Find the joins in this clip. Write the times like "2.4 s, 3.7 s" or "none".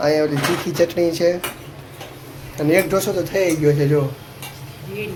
none